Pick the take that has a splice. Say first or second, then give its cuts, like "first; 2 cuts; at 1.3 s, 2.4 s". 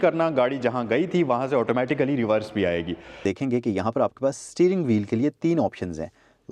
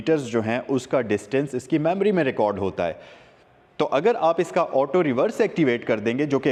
first; 1 cut; at 3.2 s